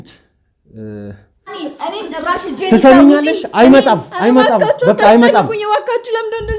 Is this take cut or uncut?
cut